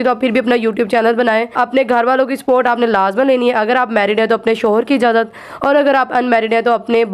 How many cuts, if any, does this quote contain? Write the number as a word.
one